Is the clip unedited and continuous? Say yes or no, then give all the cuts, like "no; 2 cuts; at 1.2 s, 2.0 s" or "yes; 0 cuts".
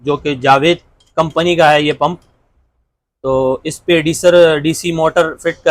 yes; 0 cuts